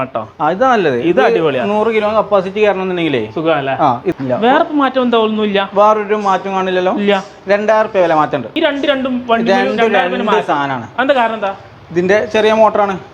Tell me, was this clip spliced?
yes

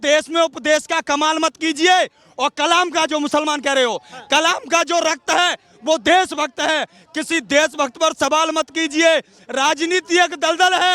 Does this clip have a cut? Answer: no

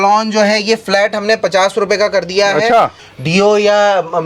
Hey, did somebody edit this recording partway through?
yes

